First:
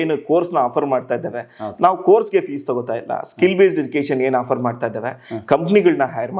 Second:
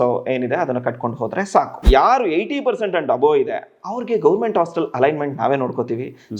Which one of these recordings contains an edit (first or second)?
second